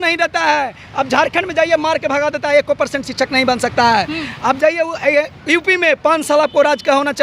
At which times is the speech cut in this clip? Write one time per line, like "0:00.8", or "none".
none